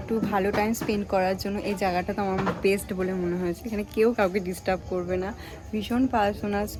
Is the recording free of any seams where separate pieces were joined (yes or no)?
yes